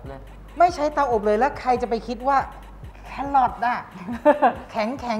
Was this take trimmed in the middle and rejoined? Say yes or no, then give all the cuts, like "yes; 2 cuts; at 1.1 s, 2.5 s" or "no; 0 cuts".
no; 0 cuts